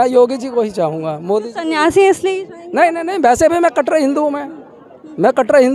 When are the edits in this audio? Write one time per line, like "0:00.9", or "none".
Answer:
none